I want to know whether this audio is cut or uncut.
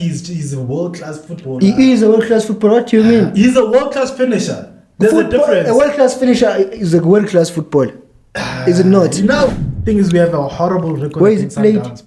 cut